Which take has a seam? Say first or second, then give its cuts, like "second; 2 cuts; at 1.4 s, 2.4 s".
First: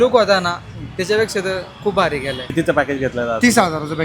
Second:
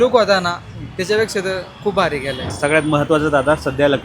second; 1 cut; at 2.4 s